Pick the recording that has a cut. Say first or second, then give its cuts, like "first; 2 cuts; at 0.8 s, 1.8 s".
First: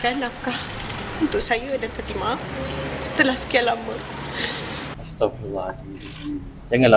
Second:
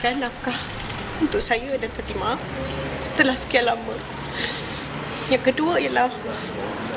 first; 1 cut; at 5.0 s